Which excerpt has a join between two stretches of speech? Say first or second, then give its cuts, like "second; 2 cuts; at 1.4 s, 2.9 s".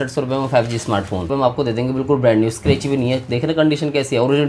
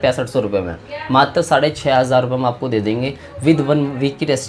first; 1 cut; at 1.3 s